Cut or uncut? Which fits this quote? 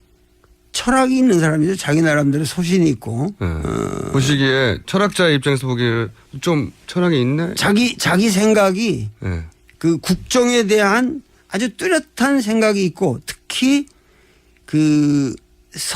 cut